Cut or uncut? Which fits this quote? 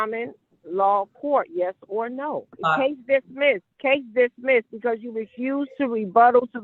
cut